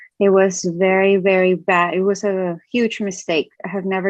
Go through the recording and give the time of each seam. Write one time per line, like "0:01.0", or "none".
none